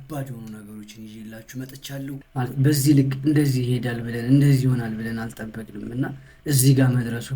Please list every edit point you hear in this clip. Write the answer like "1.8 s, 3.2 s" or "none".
2.2 s